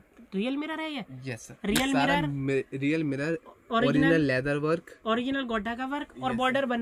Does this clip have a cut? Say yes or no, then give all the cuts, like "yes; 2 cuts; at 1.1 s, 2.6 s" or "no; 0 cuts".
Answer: no; 0 cuts